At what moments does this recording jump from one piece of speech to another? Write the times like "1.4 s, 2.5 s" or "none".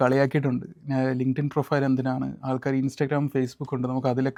none